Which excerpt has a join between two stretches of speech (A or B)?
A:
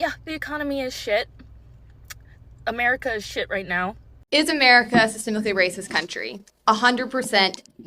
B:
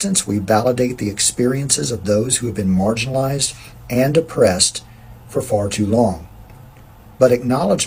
A